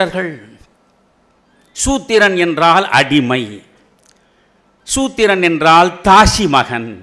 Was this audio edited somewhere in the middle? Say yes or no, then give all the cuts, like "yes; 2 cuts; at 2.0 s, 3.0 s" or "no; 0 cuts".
no; 0 cuts